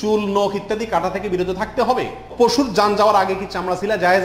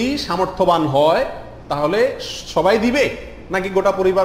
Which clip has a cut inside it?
first; 1 cut; at 2.2 s

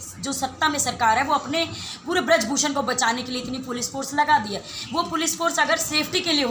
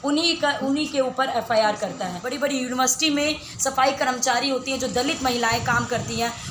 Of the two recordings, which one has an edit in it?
second; 1 cut; at 2.2 s

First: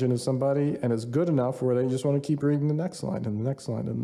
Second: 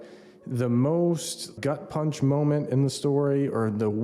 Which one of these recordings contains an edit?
second; 1 cut; at 1.5 s

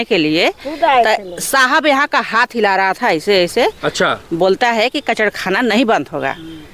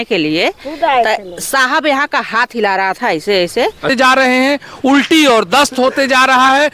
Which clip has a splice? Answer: second; 1 cut; at 3.9 s

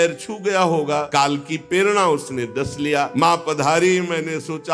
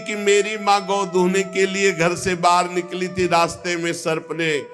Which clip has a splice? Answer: first; 2 cuts; at 1.1 s, 3.1 s

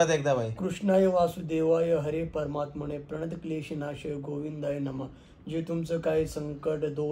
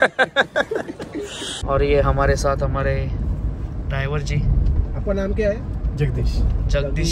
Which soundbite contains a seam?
second; 1 cut; at 1.5 s

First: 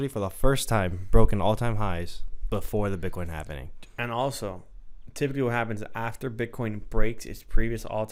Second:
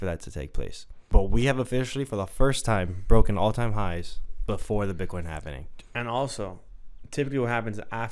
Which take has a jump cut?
second; 1 cut; at 0.9 s

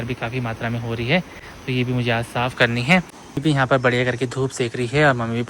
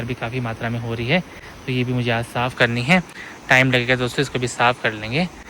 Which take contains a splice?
first; 1 cut; at 3.2 s

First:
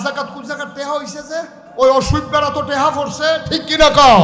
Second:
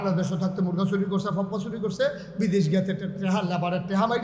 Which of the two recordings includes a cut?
first; 1 cut; at 1.6 s

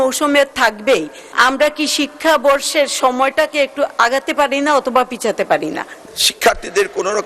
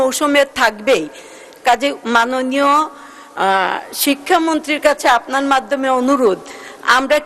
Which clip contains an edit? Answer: first; 2 cuts; at 1.2 s, 5.9 s

